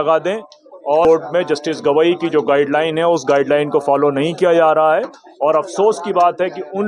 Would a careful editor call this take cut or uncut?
cut